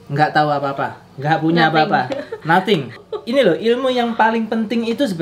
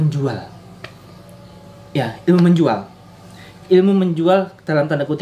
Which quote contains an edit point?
first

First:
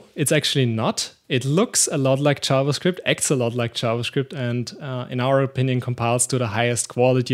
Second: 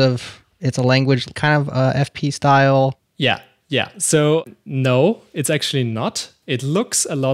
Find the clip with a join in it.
second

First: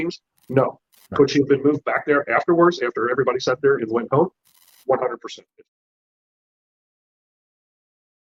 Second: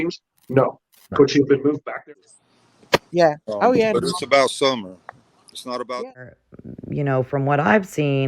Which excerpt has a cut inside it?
second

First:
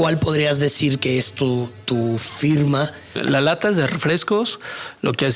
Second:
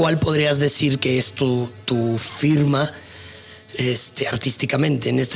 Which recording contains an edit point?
first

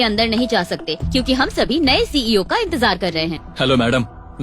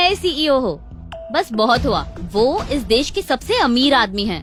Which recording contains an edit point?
first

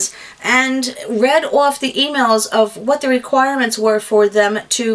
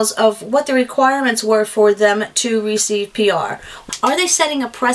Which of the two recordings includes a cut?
second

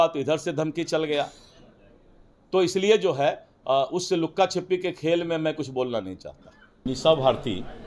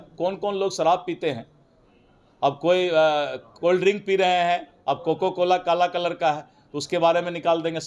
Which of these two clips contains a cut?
first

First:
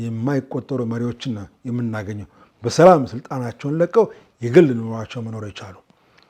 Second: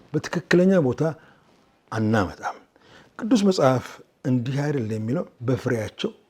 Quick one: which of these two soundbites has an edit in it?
second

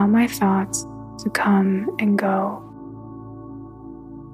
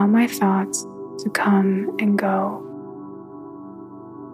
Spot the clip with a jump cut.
first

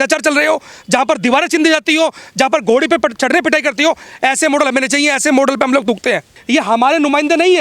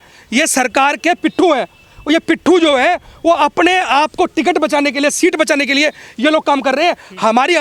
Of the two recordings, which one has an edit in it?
first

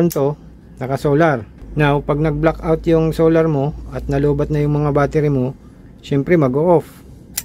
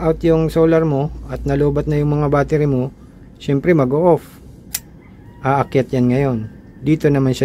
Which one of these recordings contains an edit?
first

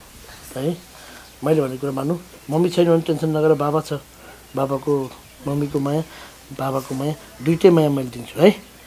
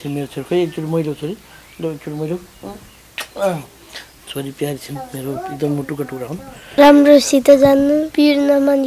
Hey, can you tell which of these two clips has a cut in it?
second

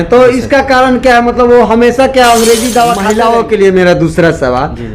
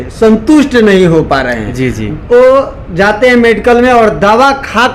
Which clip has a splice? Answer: first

